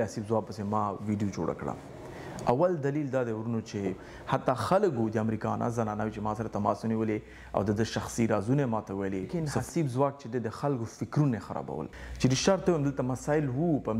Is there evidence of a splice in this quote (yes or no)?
yes